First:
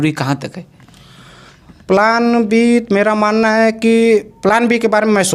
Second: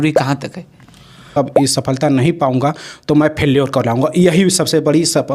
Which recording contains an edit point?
second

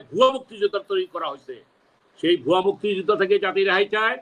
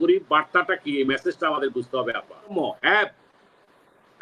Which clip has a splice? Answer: second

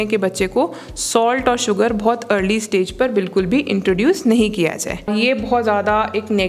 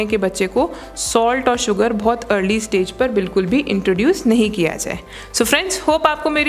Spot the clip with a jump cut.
first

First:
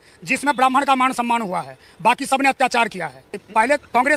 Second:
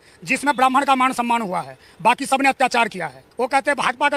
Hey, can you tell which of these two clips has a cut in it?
second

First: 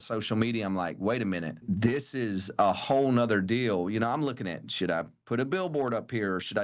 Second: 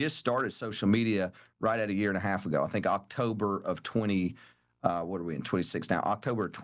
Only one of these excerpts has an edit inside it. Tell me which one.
first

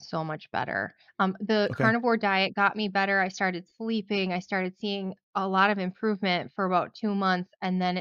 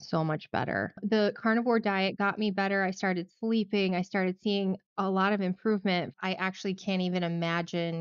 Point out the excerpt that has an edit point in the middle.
second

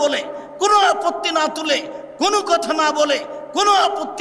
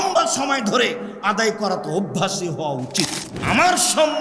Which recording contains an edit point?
second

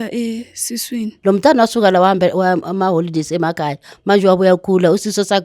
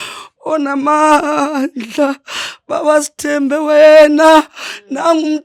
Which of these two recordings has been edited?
first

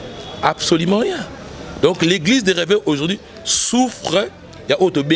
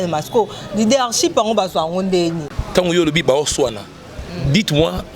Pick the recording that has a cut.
second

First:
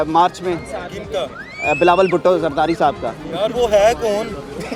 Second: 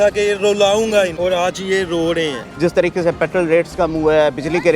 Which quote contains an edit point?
second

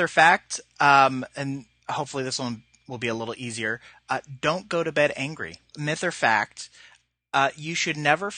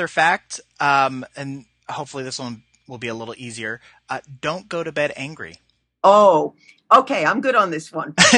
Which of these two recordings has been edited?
first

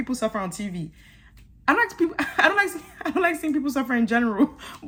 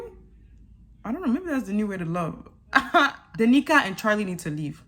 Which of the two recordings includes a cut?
second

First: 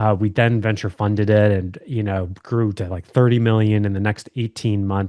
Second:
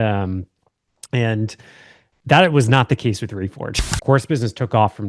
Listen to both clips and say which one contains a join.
second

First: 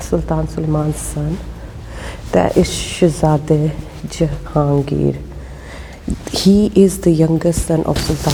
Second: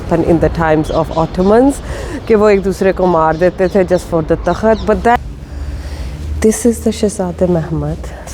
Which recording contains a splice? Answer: second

